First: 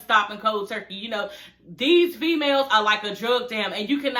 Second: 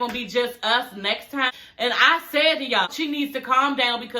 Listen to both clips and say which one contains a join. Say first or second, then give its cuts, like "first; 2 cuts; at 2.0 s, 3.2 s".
second; 2 cuts; at 1.5 s, 2.9 s